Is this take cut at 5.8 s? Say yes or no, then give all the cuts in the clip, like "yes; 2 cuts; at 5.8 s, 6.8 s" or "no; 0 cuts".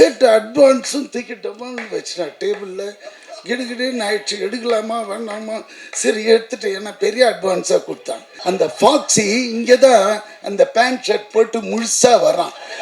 no; 1 cut; at 8.3 s